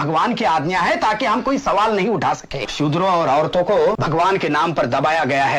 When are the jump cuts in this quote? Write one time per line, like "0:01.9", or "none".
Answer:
0:02.7
0:04.0